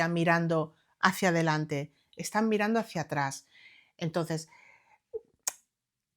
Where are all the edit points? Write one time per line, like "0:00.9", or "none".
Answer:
none